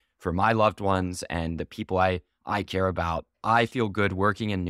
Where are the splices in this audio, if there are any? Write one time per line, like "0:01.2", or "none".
0:03.3